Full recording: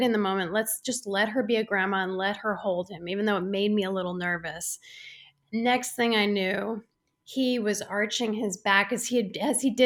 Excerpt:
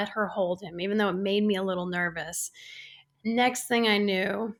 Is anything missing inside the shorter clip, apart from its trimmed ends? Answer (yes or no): no